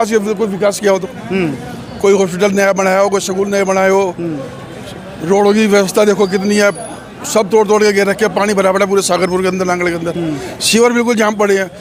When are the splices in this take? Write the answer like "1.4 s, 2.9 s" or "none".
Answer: none